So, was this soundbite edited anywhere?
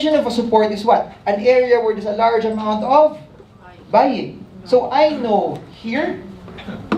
no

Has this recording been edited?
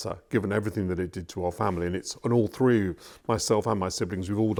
no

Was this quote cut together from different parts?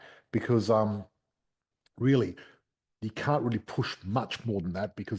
no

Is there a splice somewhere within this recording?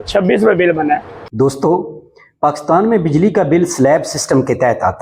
yes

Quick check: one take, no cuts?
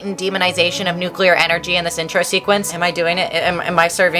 no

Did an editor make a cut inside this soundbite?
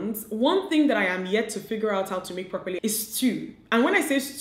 yes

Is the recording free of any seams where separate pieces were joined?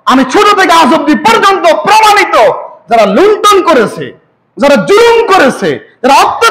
yes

